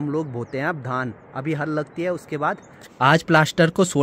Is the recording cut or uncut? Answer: cut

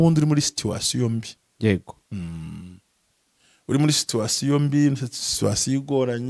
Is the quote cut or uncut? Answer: uncut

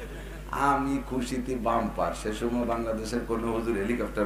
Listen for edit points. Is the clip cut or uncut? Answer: uncut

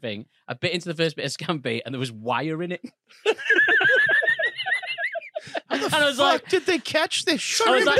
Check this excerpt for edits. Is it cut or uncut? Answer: uncut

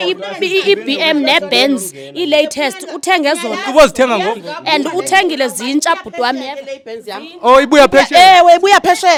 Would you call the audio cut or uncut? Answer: uncut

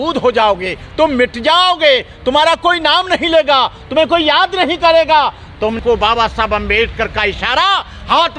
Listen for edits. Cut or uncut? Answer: cut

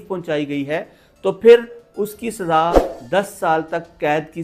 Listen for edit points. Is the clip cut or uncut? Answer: cut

